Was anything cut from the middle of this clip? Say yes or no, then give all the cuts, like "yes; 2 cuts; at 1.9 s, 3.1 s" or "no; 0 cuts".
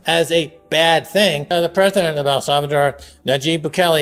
no; 0 cuts